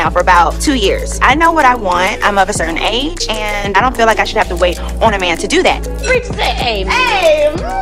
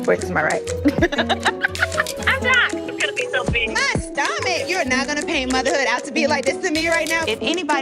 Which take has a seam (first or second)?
second